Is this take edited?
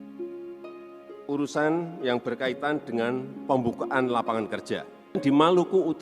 yes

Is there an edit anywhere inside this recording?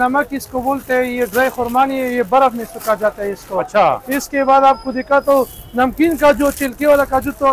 no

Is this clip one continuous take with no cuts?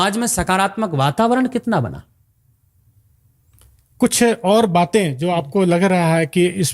yes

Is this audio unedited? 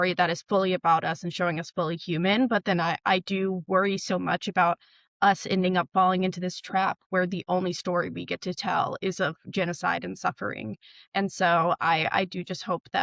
yes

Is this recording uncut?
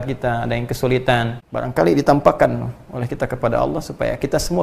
no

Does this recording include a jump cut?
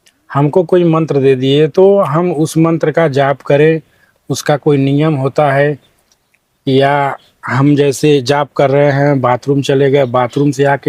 no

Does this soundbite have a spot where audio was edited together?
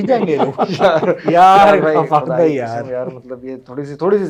no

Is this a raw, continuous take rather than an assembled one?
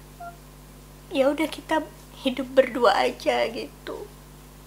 yes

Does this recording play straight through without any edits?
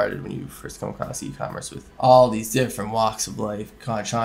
yes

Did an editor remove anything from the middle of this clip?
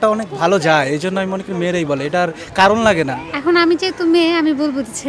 yes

